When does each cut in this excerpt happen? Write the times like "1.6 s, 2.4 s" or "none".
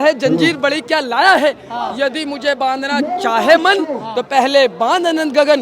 none